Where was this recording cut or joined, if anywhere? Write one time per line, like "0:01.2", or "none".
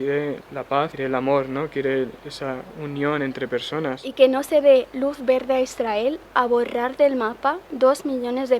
0:00.9
0:04.0